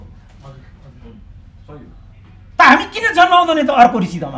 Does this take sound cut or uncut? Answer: uncut